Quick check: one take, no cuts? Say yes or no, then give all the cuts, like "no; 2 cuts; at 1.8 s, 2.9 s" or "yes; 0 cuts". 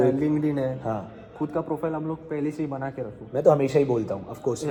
yes; 0 cuts